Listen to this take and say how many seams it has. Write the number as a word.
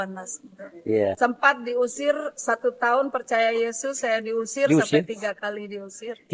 one